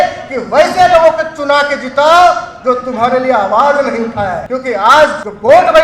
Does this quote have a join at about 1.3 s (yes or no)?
no